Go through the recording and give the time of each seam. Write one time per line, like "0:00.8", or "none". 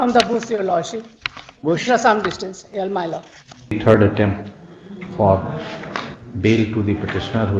0:03.7